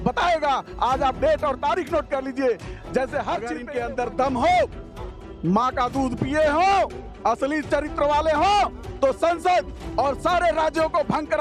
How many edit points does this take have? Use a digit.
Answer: 1